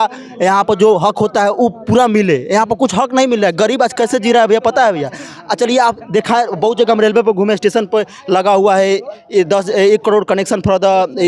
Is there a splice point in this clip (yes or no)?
no